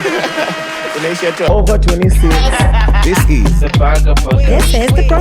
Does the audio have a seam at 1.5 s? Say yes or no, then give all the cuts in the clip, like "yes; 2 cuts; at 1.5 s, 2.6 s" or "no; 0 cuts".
yes; 1 cut; at 1.5 s